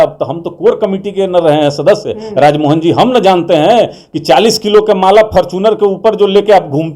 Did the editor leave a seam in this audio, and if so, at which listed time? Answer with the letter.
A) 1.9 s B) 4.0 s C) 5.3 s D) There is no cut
D